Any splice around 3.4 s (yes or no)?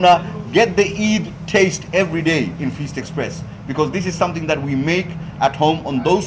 no